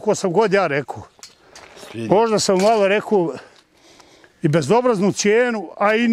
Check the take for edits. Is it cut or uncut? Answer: uncut